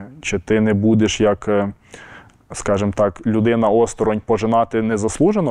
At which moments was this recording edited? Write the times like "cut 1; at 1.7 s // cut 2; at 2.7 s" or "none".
none